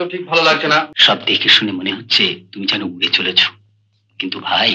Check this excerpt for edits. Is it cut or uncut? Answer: cut